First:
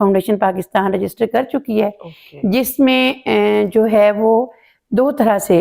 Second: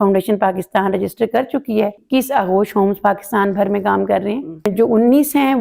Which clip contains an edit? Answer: second; 2 cuts; at 2.0 s, 4.7 s

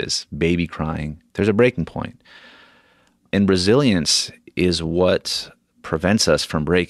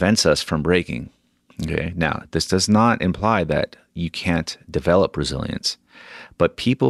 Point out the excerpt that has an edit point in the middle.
first; 1 cut; at 3.2 s

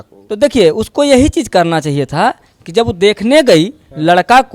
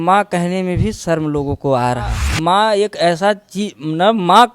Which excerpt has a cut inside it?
second; 1 cut; at 2.2 s

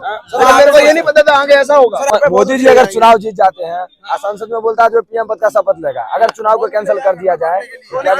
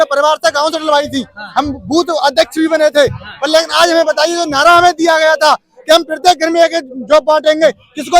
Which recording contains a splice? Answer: first; 1 cut; at 2.1 s

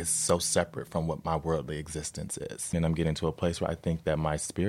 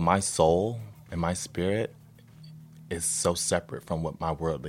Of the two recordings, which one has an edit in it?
first; 1 cut; at 2.7 s

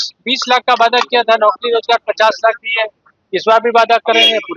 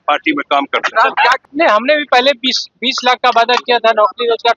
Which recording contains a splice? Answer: second; 1 cut; at 1.4 s

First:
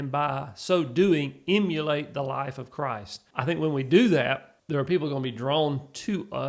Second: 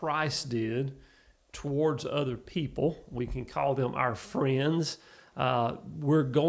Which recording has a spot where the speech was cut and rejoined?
first; 2 cuts; at 3.1 s, 4.5 s

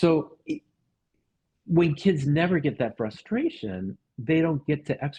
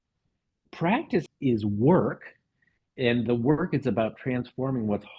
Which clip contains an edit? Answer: second; 1 cut; at 1.2 s

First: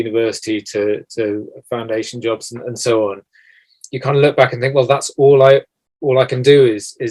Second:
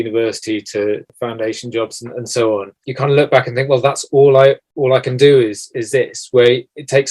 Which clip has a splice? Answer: second; 3 cuts; at 1.1 s, 2.8 s, 4.7 s

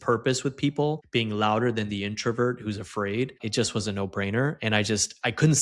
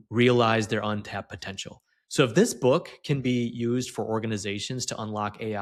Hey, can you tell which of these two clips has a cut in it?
first; 2 cuts; at 1.0 s, 3.4 s

